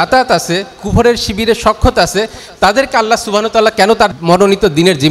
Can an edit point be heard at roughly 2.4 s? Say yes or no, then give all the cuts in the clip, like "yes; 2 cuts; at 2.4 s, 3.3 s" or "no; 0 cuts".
no; 1 cut; at 4.2 s